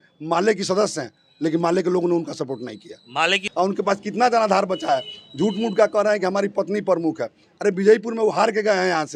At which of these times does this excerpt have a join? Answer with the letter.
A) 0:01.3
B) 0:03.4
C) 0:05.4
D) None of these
B